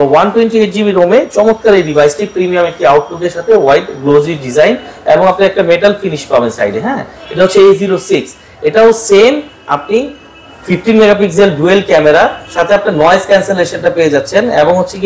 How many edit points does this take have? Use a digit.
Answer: 0